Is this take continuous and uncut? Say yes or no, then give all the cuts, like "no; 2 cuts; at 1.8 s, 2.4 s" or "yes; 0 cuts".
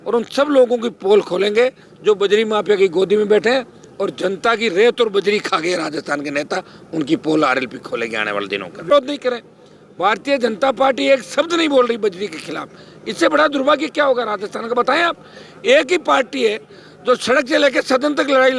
no; 1 cut; at 8.9 s